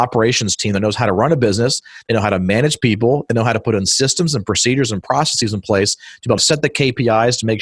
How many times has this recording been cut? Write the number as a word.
two